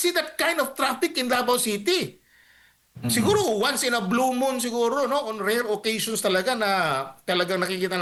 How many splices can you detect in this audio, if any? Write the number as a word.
zero